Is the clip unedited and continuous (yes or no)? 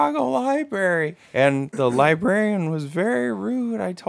no